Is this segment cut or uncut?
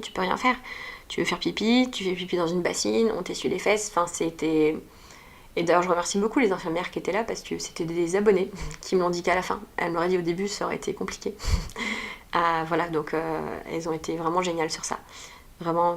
uncut